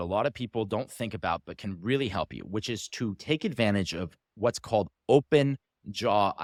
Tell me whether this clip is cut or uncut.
uncut